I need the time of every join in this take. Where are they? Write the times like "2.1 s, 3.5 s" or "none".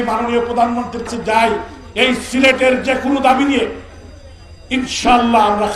1.1 s